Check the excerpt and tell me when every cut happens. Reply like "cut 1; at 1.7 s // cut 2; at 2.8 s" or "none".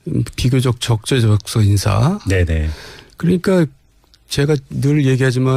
cut 1; at 3.2 s